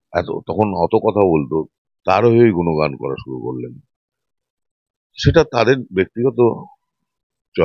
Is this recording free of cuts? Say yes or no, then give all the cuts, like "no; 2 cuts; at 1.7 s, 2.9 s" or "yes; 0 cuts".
yes; 0 cuts